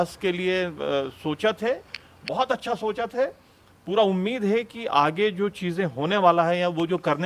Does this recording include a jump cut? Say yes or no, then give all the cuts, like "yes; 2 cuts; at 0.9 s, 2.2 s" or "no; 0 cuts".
no; 0 cuts